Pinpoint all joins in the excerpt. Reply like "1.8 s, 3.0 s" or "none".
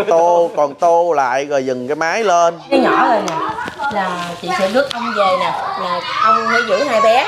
2.7 s